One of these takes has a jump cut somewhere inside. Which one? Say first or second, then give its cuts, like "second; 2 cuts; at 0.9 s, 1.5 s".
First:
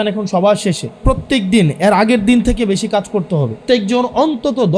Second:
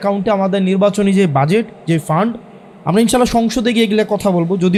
first; 2 cuts; at 1.0 s, 3.6 s